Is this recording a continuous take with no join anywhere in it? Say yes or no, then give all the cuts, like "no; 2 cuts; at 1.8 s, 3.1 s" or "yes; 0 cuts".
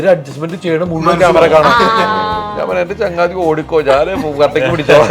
yes; 0 cuts